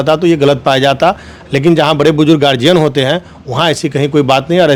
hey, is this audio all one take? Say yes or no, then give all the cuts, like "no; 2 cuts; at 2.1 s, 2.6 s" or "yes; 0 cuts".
yes; 0 cuts